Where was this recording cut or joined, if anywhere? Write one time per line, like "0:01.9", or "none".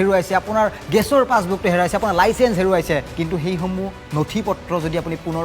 0:03.1